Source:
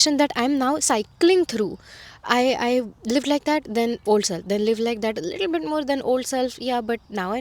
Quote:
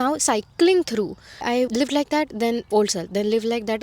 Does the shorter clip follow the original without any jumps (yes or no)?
no